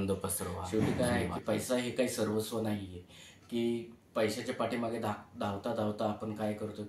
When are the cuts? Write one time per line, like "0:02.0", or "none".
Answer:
0:00.9

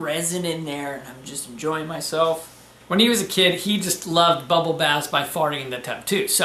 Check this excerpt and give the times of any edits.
0:02.7

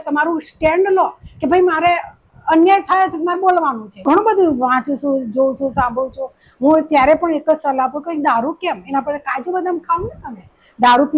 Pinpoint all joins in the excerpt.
0:04.1

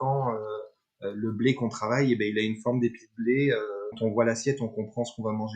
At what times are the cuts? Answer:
0:04.0

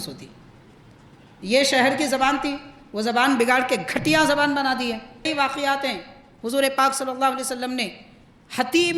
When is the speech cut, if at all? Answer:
0:05.3

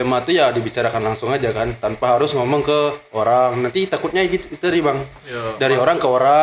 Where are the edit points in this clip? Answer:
none

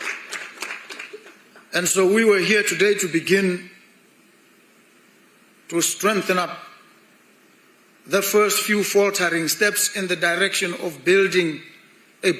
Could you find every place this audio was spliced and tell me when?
none

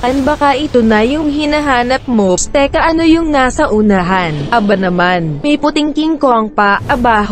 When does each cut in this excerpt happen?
0:02.4

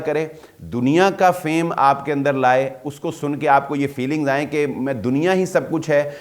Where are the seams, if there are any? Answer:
none

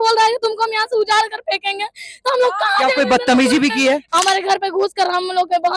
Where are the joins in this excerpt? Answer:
0:04.1

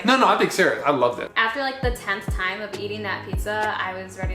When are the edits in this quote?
0:01.3

